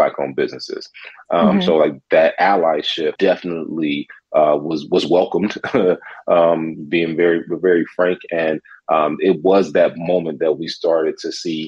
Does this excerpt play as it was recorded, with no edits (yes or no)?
no